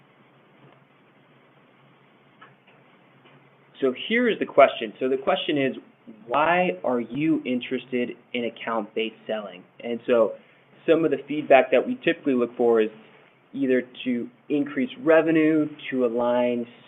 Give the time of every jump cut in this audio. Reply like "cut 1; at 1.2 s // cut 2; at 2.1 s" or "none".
cut 1; at 10.7 s